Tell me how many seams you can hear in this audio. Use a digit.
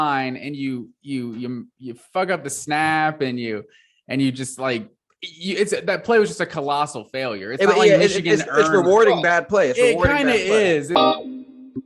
1